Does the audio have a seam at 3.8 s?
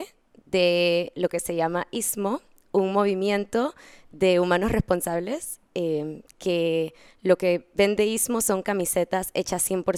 no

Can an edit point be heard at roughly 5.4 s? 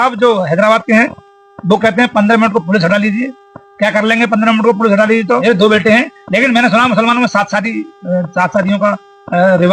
yes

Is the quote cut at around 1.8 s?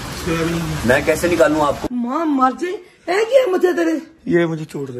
yes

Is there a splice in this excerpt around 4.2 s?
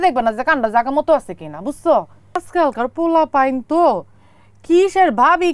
no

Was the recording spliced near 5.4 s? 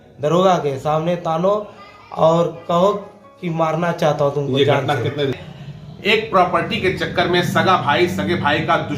yes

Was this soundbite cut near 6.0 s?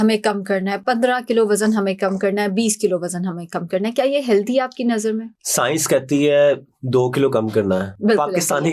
no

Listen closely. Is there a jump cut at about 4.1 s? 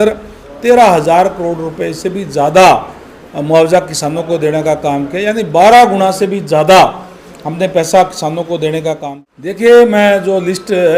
no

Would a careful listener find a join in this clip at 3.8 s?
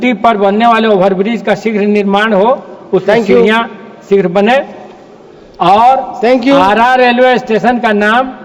no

